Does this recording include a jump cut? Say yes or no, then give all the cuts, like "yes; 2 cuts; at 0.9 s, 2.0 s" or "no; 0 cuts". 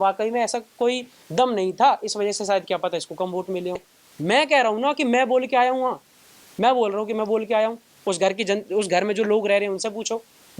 no; 0 cuts